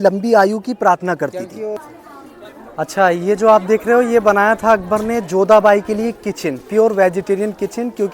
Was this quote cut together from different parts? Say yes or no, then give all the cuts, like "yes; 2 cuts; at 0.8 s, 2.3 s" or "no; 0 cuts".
yes; 1 cut; at 1.9 s